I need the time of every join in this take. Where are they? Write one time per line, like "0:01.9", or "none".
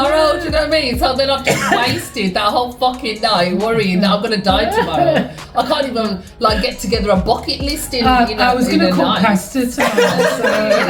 none